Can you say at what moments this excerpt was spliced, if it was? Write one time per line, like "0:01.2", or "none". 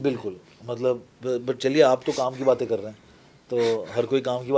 none